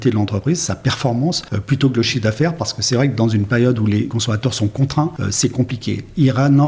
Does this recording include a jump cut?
yes; 3 cuts; at 1.5 s, 4.1 s, 5.2 s

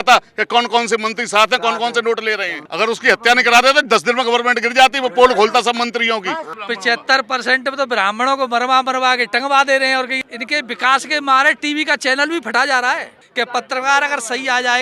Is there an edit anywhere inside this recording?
yes; 4 cuts; at 2.6 s, 6.6 s, 10.1 s, 13.2 s

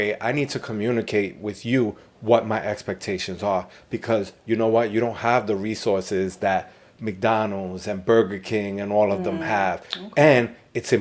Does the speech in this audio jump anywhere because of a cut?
no; 0 cuts

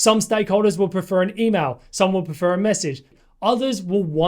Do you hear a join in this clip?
yes; 1 cut; at 3.1 s

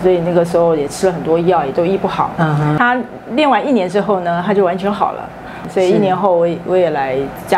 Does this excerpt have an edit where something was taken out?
yes; 1 cut; at 2.8 s

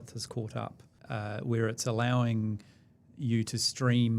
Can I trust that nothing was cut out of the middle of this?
no; 1 cut; at 0.9 s

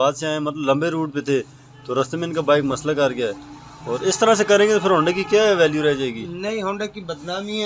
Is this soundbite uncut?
yes; 0 cuts

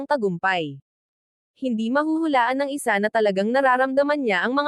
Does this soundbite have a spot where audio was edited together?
no; 0 cuts

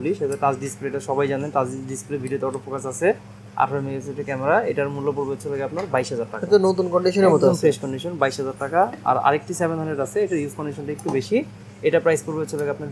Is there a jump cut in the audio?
no; 0 cuts

